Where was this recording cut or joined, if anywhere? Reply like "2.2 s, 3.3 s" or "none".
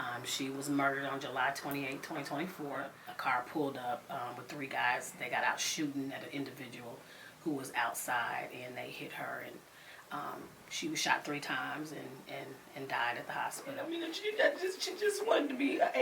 3.0 s, 13.8 s